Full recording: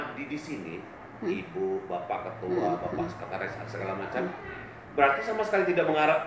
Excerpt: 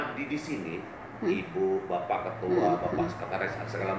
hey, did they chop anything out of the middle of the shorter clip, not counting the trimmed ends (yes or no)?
no